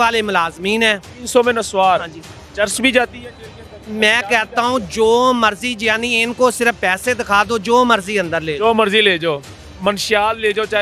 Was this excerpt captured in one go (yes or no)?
yes